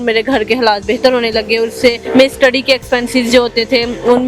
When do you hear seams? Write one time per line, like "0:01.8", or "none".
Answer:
0:02.0

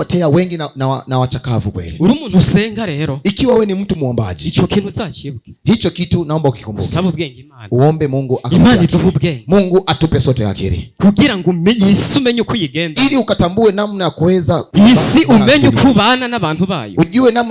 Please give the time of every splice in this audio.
0:14.7

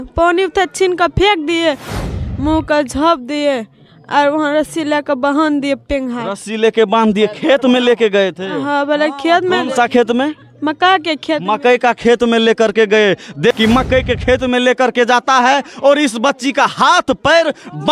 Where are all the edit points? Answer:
0:02.1
0:13.6

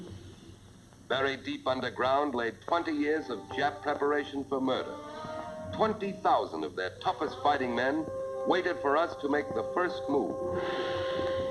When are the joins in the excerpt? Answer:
0:08.0

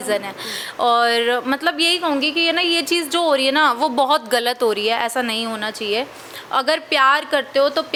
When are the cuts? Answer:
none

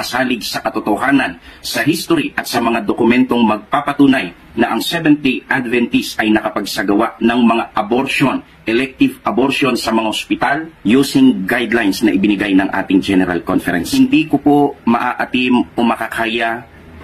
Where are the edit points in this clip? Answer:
0:01.4
0:08.6
0:13.8

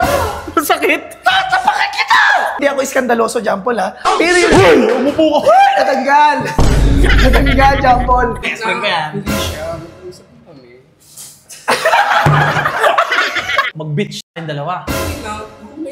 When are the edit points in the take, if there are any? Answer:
0:02.6
0:08.5
0:13.8

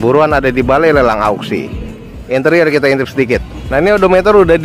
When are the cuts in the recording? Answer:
0:02.1

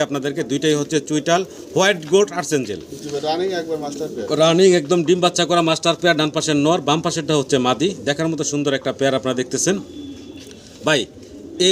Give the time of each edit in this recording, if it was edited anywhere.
none

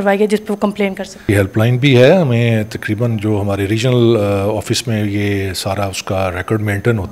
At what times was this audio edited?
0:01.3

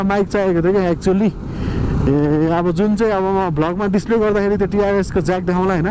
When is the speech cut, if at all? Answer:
none

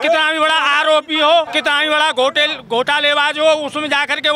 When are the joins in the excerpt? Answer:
0:01.5

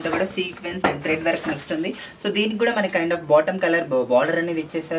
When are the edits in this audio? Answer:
none

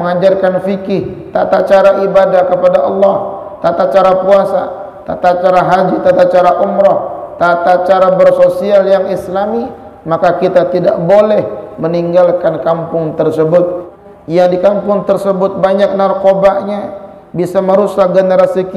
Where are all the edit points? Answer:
0:13.9

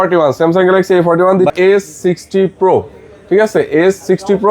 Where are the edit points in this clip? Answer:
0:01.5

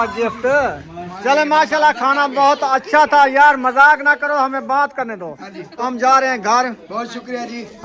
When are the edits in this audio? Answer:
0:01.2
0:05.8

